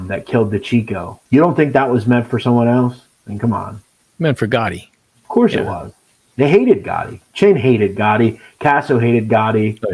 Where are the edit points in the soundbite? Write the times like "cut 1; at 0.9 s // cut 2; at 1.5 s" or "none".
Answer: cut 1; at 1.1 s